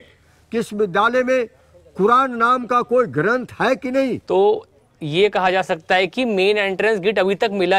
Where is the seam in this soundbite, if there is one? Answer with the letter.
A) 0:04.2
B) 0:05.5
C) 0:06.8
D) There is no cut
A